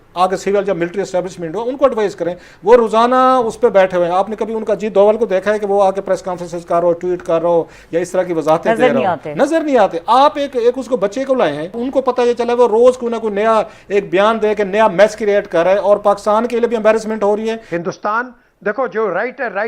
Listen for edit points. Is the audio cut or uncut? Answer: cut